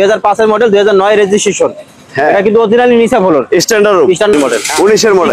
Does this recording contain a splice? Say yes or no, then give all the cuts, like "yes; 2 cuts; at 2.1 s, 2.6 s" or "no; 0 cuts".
yes; 1 cut; at 4.4 s